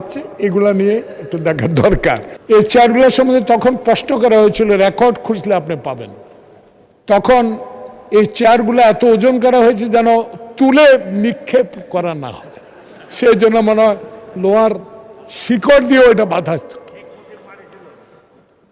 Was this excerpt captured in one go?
no; 1 cut; at 2.3 s

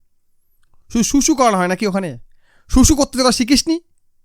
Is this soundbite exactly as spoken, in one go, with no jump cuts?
yes; 0 cuts

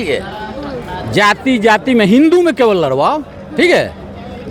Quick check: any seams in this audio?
no; 0 cuts

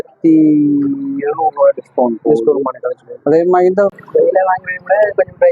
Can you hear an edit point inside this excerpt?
yes; 1 cut; at 3.9 s

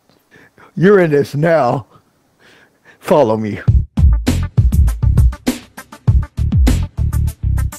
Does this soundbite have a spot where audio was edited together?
yes; 1 cut; at 3.8 s

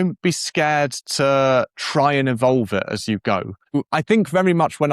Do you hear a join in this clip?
yes; 1 cut; at 3.8 s

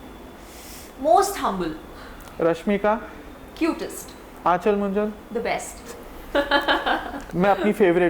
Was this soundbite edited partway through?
yes; 1 cut; at 7.2 s

